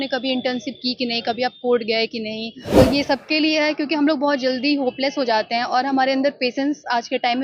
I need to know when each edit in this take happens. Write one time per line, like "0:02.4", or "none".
0:02.8